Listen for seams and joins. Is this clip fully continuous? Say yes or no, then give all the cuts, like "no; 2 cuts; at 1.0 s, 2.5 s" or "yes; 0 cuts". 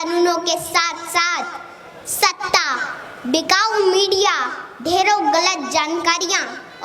yes; 0 cuts